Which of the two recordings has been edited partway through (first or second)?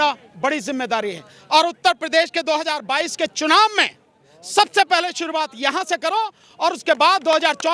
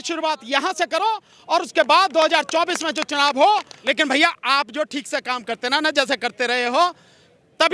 second